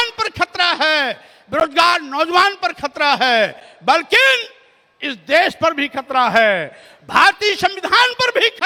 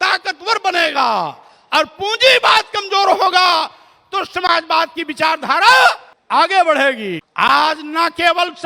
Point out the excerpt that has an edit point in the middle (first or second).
second